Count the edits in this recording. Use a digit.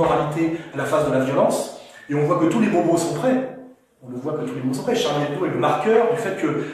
0